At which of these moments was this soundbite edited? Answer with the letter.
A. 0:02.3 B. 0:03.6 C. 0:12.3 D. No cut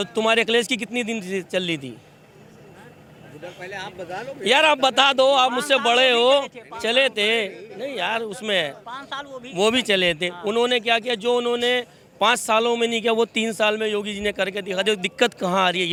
D